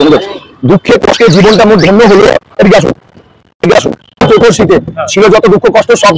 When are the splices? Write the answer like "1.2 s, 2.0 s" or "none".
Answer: 4.2 s